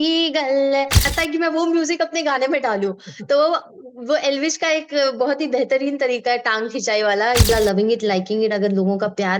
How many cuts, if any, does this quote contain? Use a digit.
2